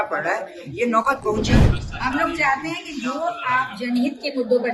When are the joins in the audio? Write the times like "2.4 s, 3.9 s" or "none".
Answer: 1.6 s